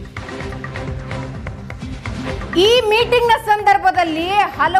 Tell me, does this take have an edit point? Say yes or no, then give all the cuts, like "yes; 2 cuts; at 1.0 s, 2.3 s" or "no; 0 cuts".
yes; 1 cut; at 1.6 s